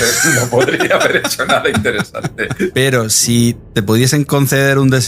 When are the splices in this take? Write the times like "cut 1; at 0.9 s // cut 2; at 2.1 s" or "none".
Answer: cut 1; at 2.7 s // cut 2; at 3.6 s